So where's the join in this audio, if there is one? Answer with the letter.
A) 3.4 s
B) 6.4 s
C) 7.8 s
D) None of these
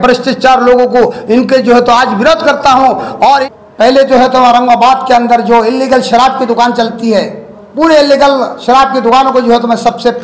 A